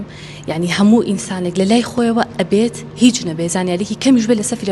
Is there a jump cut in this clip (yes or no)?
no